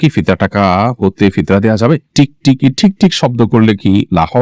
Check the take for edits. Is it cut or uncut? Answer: cut